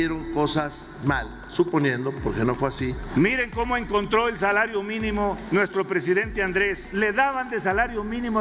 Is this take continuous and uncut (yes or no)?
no